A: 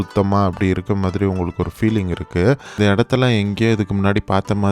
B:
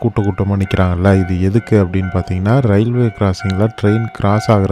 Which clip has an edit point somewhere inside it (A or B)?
A